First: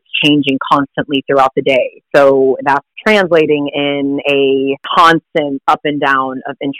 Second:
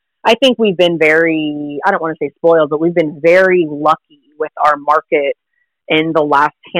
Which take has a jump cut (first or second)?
first